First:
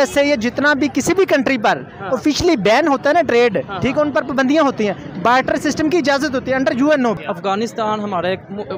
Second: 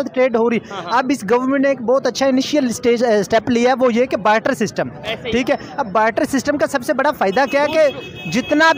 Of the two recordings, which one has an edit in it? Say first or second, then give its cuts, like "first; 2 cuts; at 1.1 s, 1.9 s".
first; 1 cut; at 7.2 s